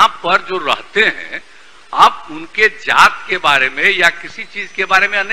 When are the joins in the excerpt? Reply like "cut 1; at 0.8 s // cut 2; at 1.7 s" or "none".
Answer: none